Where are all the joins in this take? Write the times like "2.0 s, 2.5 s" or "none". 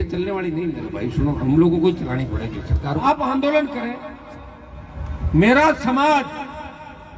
3.0 s